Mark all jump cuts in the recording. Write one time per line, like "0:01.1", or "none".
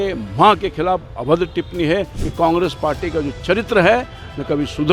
0:02.2